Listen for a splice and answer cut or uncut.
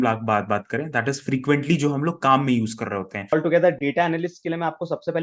cut